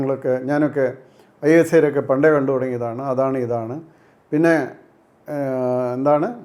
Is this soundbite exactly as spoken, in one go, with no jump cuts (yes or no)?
yes